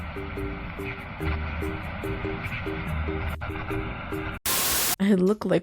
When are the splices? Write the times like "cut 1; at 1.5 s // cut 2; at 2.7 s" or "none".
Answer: cut 1; at 4.4 s